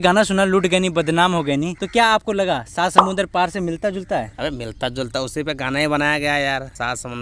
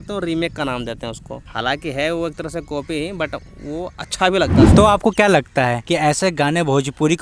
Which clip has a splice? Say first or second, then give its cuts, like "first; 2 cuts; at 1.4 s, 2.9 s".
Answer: second; 2 cuts; at 4.7 s, 5.8 s